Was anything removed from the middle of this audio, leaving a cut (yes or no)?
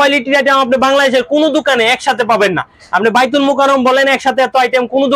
no